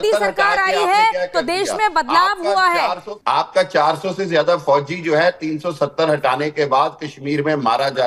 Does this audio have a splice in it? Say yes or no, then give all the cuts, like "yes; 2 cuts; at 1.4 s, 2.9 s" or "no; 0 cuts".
yes; 1 cut; at 3.1 s